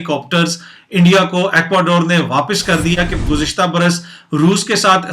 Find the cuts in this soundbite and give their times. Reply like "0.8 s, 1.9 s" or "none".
2.9 s